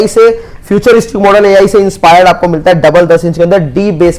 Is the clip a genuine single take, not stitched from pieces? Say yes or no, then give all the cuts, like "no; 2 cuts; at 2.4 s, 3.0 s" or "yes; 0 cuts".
yes; 0 cuts